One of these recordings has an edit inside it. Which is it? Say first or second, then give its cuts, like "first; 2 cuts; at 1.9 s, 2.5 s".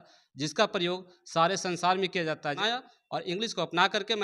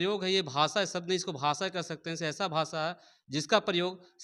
first; 1 cut; at 2.6 s